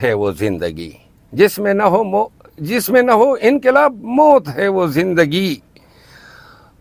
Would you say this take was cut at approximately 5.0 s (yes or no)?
no